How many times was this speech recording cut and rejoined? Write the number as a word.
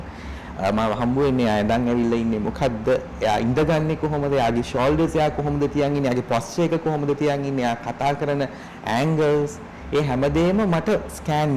zero